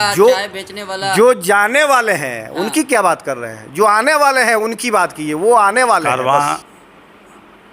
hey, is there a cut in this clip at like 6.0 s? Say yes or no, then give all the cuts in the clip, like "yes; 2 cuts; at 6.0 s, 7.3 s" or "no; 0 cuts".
yes; 1 cut; at 6.0 s